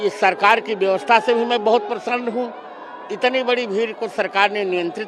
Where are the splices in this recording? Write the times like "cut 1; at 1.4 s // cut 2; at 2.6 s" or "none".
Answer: none